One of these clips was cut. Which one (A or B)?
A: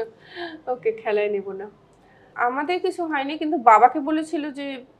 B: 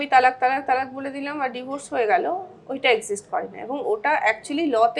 A